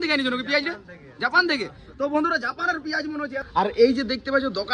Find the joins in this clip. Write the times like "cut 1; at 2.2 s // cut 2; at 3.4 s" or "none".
cut 1; at 3.4 s